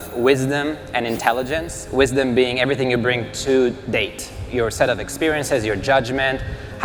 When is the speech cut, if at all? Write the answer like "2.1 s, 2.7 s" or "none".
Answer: none